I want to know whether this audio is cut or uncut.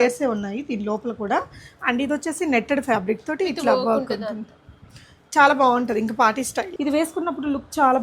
cut